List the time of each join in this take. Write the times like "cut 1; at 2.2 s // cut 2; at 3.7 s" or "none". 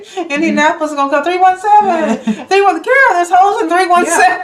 none